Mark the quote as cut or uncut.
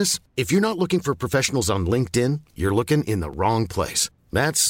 uncut